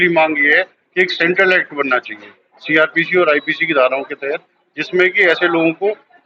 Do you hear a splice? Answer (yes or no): no